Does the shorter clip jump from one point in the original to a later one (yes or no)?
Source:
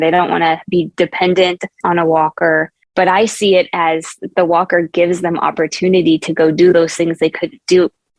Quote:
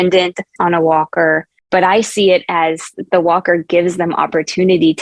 no